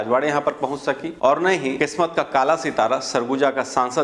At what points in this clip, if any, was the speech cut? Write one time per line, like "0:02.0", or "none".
0:01.1
0:01.8